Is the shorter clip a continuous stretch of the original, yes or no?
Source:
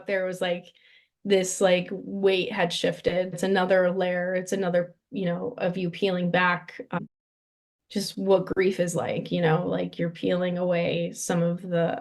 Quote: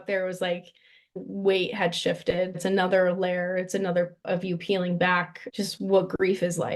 no